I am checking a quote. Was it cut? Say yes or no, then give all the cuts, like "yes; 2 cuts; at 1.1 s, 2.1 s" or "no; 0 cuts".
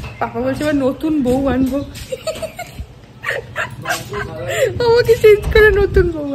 no; 0 cuts